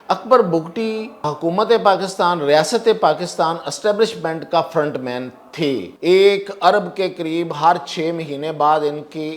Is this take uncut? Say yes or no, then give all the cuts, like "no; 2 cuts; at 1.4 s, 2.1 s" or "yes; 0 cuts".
no; 2 cuts; at 1.3 s, 5.9 s